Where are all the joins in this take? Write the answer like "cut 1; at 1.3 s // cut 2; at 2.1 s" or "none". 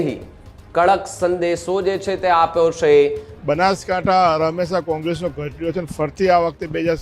cut 1; at 3.3 s